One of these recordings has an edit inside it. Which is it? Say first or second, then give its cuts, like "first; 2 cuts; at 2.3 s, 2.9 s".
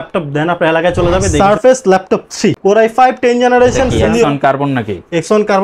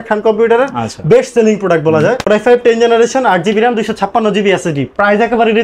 first; 3 cuts; at 1.3 s, 2.6 s, 4.2 s